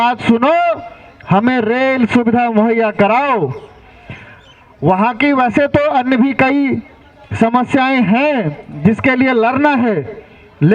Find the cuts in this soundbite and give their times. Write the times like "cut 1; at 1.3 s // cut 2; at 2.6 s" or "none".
none